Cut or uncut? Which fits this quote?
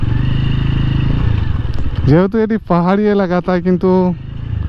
uncut